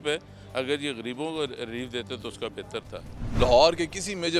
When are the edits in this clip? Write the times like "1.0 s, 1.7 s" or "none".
3.2 s